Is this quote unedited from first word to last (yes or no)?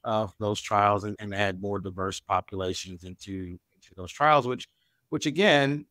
yes